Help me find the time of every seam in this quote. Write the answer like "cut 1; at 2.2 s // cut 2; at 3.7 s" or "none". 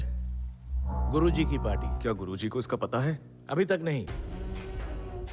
cut 1; at 1.9 s

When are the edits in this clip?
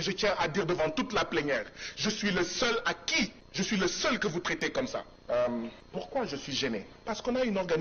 cut 1; at 3.4 s // cut 2; at 5.1 s // cut 3; at 5.8 s // cut 4; at 6.9 s

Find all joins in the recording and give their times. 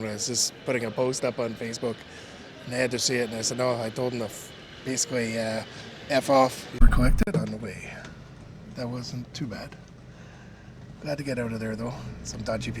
cut 1; at 6.7 s

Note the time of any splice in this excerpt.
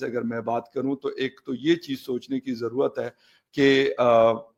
none

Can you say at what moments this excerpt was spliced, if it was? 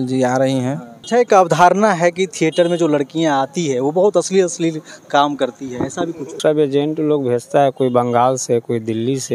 cut 1; at 1.0 s // cut 2; at 6.4 s

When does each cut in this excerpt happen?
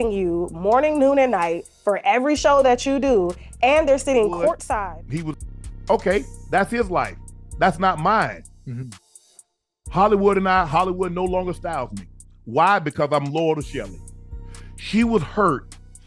cut 1; at 4.7 s

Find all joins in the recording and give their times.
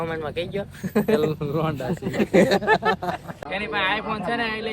cut 1; at 3.3 s

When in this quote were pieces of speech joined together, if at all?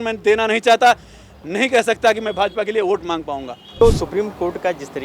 cut 1; at 3.8 s

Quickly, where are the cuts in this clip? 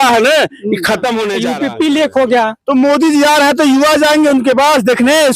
cut 1; at 1.3 s

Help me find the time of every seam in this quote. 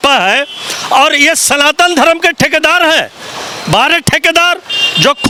none

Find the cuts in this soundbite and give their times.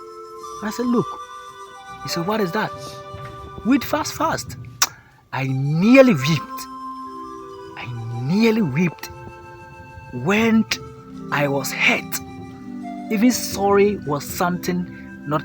cut 1; at 6.6 s // cut 2; at 8.1 s

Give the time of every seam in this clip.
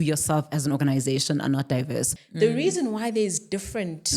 cut 1; at 2.2 s

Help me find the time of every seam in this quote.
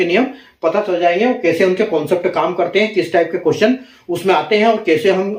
none

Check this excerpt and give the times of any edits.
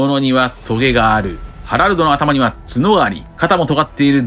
cut 1; at 1.4 s

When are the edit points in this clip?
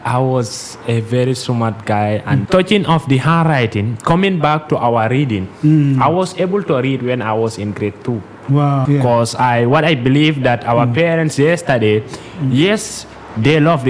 cut 1; at 2.4 s // cut 2; at 8.8 s

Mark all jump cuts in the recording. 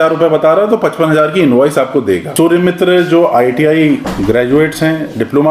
cut 1; at 2.3 s

